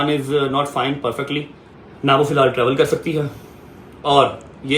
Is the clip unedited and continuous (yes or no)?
yes